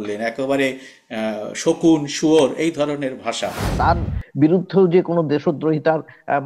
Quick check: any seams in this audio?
yes; 1 cut; at 3.7 s

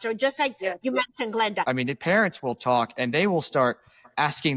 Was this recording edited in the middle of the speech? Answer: yes; 1 cut; at 1.6 s

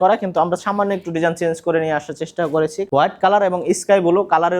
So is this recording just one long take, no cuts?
no; 1 cut; at 2.8 s

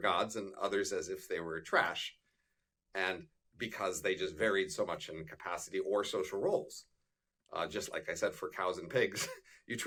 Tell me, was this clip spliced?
no; 0 cuts

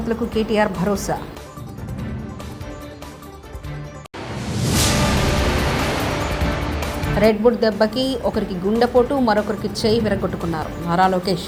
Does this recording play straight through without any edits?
yes; 0 cuts

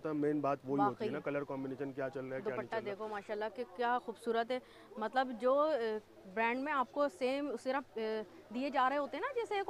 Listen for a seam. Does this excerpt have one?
no; 0 cuts

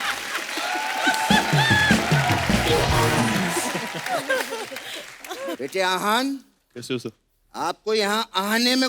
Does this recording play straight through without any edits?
yes; 0 cuts

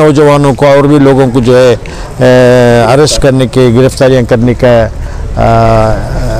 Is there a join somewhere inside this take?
no; 0 cuts

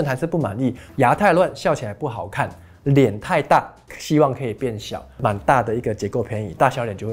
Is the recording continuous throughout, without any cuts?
no; 2 cuts; at 0.8 s, 5.2 s

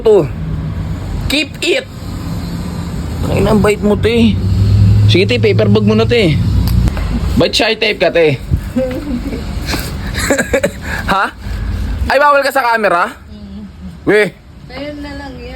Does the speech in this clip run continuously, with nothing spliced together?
no; 1 cut; at 6.9 s

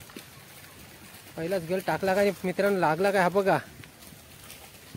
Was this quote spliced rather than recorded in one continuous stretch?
no; 0 cuts

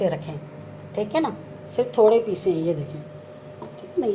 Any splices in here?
no; 0 cuts

